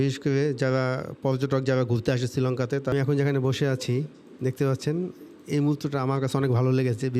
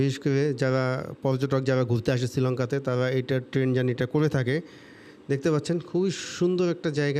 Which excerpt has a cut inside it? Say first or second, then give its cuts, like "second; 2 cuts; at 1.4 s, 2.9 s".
first; 1 cut; at 2.9 s